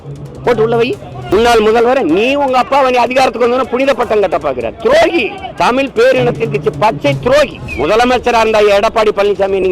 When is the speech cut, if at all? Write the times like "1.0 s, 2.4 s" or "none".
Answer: 1.2 s, 5.4 s, 7.6 s